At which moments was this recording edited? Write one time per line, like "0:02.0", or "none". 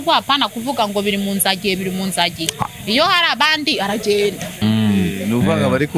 0:04.6